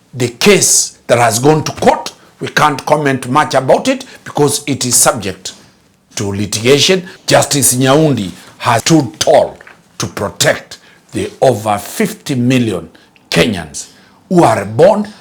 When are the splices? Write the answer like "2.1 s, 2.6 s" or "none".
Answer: 7.1 s, 8.8 s